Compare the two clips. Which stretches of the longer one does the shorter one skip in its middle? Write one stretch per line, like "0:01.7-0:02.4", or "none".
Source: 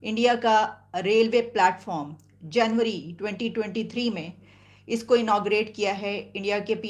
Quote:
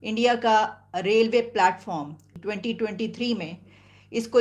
0:02.3-0:03.1